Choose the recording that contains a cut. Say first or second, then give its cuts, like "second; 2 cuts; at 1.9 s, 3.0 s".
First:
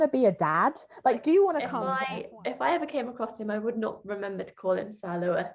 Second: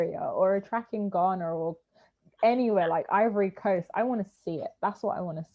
first; 1 cut; at 1.8 s